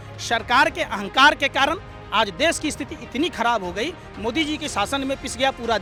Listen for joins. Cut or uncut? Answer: uncut